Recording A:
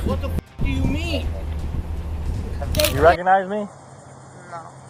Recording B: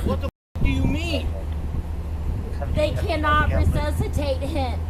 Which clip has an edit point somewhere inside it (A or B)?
A